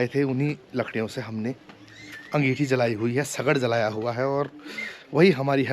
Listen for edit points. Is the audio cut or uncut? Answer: uncut